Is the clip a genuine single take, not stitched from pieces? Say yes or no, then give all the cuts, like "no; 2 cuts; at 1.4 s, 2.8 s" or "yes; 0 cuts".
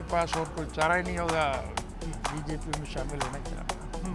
yes; 0 cuts